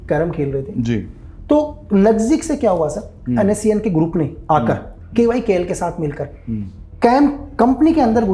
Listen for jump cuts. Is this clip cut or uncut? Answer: uncut